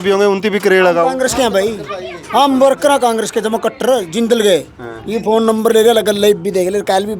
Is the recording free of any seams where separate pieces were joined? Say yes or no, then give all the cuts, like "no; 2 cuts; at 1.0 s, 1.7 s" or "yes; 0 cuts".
yes; 0 cuts